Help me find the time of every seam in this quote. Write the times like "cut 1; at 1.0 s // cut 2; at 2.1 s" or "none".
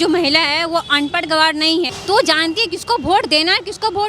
cut 1; at 1.9 s

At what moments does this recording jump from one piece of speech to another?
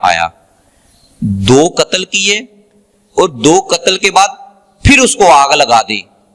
none

